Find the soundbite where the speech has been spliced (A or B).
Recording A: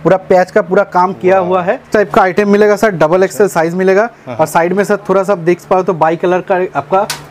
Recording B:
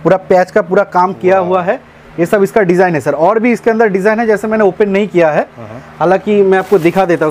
A